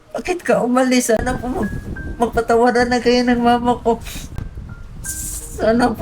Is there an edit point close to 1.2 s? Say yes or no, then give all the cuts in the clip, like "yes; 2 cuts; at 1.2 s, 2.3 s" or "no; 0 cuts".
yes; 1 cut; at 1.2 s